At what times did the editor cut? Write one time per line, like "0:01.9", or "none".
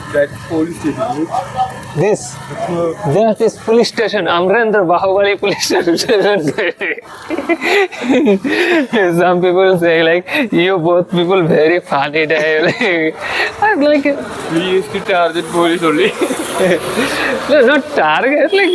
none